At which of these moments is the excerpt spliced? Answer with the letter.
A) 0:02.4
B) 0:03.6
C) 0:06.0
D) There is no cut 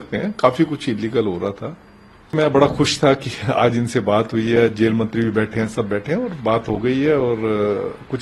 A